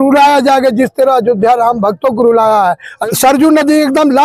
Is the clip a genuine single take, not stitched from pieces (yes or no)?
no